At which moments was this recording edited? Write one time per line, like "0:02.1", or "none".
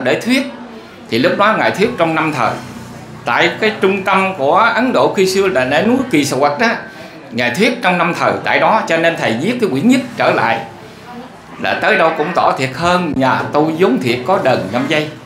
none